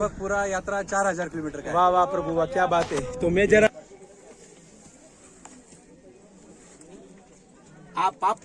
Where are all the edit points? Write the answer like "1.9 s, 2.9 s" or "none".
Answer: 3.7 s